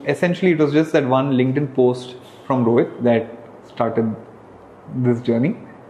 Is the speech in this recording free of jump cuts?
yes; 0 cuts

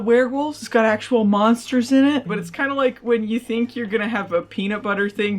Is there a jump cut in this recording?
yes; 1 cut; at 2.3 s

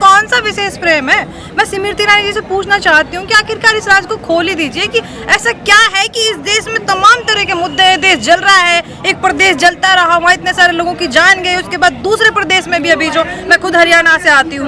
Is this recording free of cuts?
yes; 0 cuts

